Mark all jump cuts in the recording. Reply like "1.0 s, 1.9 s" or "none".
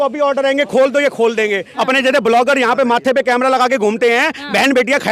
1.7 s

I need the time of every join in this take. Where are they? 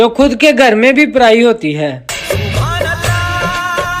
none

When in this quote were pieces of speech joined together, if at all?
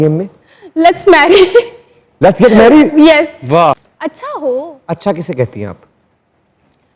3.8 s

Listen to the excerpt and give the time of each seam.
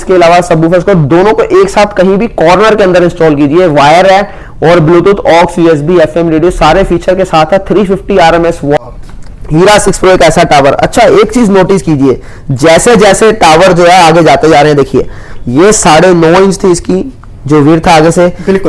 8.8 s

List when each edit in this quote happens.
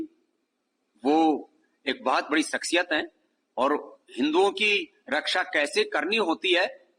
none

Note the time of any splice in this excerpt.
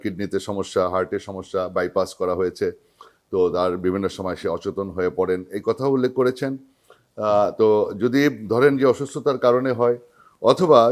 none

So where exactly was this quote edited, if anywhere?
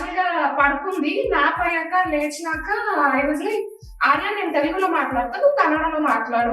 none

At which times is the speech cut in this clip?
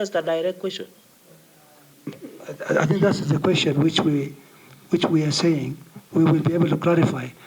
none

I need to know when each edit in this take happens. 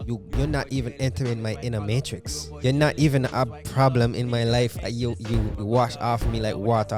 none

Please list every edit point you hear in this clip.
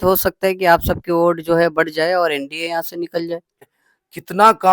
3.6 s

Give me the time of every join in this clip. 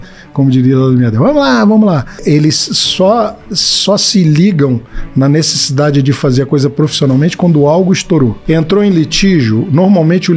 2.2 s, 8.4 s

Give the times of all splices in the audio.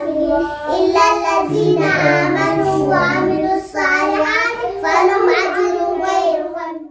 none

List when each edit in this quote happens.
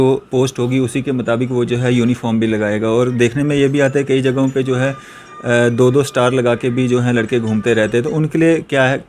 none

